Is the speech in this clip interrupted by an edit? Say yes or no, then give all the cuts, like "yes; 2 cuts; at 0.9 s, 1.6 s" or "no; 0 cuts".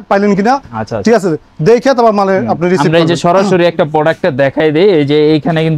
no; 0 cuts